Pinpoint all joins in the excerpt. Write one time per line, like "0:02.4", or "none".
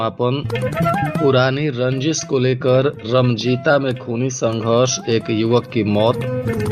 none